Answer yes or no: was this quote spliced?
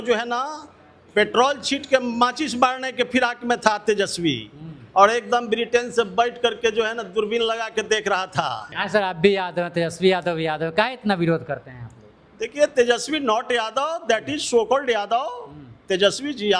yes